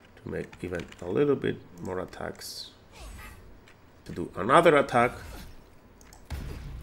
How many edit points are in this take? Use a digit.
1